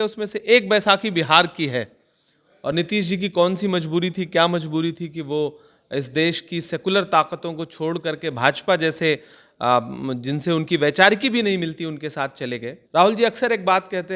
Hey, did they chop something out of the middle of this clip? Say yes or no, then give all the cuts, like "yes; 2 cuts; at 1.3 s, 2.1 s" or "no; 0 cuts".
yes; 1 cut; at 12.8 s